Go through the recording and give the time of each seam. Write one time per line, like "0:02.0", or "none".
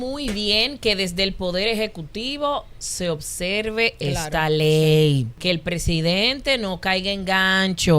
0:05.3